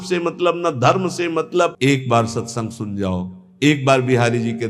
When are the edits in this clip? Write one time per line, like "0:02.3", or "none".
0:01.7